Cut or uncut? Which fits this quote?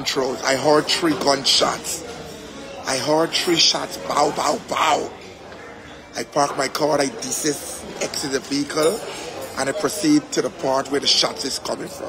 uncut